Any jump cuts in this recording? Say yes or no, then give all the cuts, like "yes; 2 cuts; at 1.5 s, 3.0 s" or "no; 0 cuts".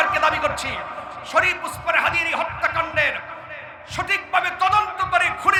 no; 0 cuts